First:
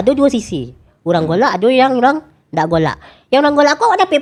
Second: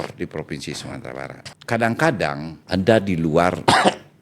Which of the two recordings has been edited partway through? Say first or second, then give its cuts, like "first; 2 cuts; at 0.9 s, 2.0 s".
second; 2 cuts; at 1.4 s, 2.5 s